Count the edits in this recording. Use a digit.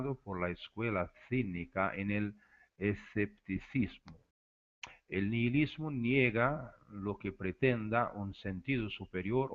0